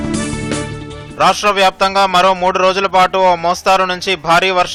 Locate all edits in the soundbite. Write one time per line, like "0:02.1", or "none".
none